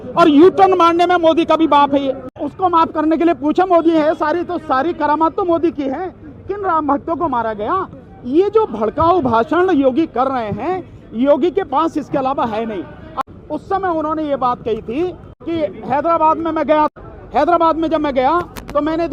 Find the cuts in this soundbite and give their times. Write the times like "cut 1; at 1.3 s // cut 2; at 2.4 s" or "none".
cut 1; at 2.4 s // cut 2; at 13.1 s // cut 3; at 15.3 s